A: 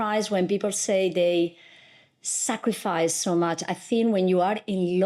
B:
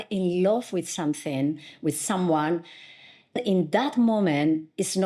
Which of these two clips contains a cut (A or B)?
B